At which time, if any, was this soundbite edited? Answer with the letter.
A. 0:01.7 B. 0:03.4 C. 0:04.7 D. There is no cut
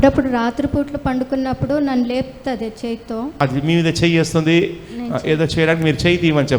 B